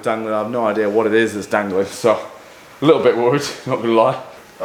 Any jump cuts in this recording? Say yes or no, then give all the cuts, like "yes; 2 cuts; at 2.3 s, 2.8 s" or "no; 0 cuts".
no; 0 cuts